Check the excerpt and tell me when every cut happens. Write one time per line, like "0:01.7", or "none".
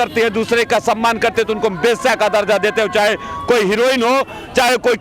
none

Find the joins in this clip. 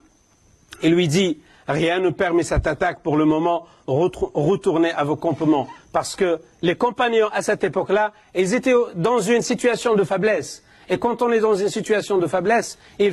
none

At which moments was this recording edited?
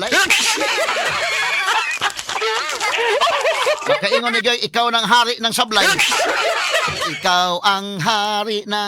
0:01.3
0:07.1

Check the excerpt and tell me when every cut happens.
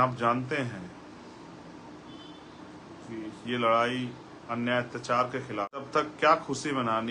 0:05.9

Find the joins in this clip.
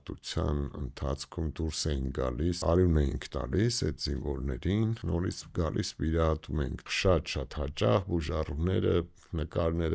0:02.6
0:05.0
0:06.8

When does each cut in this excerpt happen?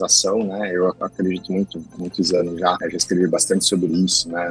0:01.0
0:02.8

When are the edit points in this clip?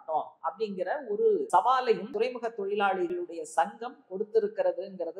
0:01.5
0:02.1
0:03.1

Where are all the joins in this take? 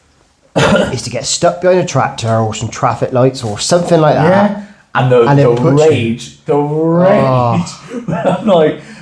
none

